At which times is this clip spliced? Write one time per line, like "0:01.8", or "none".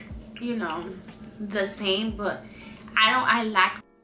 none